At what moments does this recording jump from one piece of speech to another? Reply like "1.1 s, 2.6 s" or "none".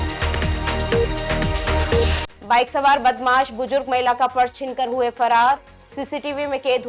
2.1 s

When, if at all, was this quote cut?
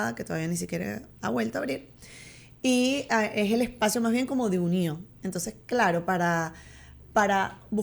none

